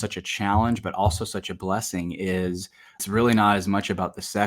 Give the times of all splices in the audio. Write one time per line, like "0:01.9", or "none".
0:03.0